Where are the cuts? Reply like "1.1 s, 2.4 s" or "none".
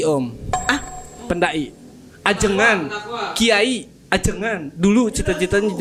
none